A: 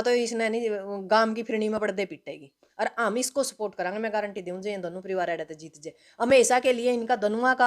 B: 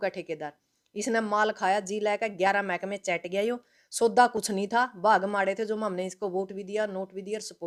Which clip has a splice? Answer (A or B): A